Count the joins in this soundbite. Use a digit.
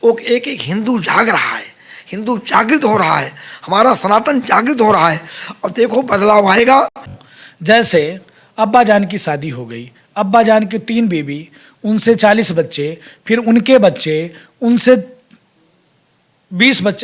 1